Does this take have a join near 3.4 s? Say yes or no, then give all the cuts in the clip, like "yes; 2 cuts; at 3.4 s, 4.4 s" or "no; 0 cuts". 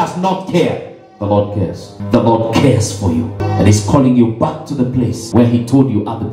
yes; 3 cuts; at 1.9 s, 3.4 s, 5.2 s